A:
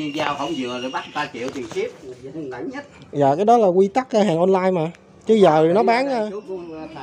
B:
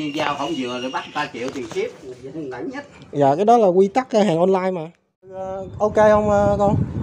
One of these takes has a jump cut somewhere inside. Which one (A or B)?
B